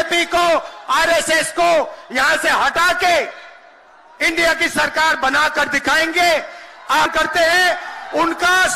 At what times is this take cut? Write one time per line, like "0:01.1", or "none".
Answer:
0:07.1